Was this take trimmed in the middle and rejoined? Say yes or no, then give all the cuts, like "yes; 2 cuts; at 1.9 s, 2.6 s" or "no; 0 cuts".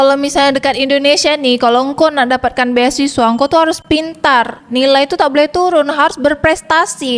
no; 0 cuts